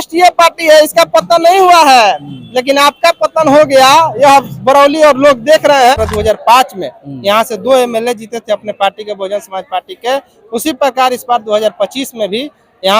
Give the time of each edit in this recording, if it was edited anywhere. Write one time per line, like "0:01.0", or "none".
0:05.9